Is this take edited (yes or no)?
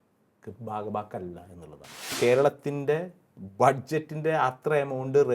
yes